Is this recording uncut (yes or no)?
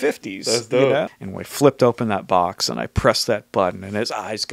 no